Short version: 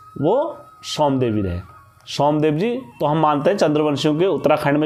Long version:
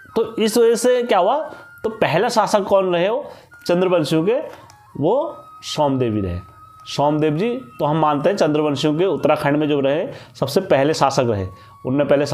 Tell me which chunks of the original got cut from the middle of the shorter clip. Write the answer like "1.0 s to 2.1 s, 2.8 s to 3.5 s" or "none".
none